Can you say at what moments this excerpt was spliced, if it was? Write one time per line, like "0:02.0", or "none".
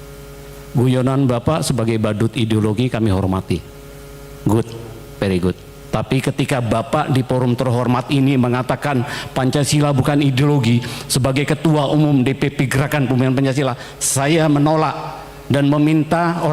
none